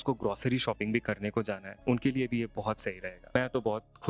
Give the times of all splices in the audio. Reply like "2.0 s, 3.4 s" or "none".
1.7 s, 3.3 s